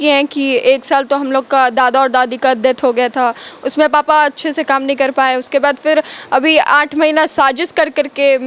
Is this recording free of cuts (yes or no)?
yes